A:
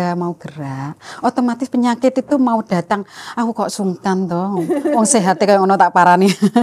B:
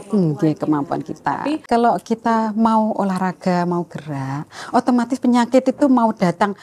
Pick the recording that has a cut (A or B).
B